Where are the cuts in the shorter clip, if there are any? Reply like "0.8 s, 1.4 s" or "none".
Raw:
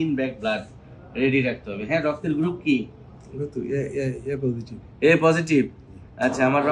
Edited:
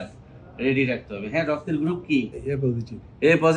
2.4 s